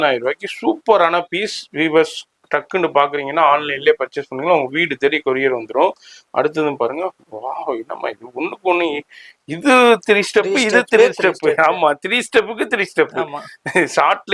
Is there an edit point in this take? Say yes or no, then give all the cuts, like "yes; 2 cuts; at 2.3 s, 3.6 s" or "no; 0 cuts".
no; 0 cuts